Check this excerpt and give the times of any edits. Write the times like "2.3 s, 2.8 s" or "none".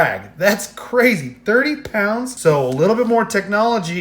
2.3 s